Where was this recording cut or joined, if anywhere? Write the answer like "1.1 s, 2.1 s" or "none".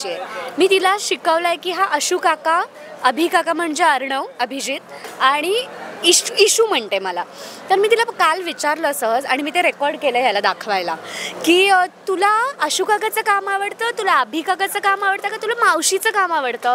none